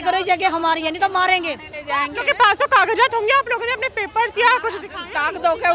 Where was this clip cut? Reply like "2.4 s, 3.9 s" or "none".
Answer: none